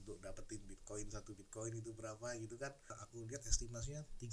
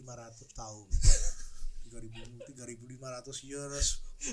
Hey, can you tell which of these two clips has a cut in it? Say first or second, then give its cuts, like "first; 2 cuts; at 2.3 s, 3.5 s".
first; 1 cut; at 3.0 s